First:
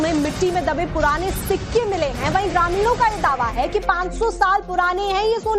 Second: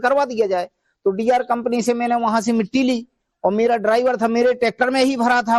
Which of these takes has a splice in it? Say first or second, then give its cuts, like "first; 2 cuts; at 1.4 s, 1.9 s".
first; 1 cut; at 1.4 s